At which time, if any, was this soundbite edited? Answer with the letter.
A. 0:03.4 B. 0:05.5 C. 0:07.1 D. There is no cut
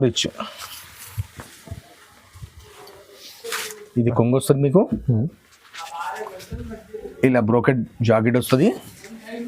A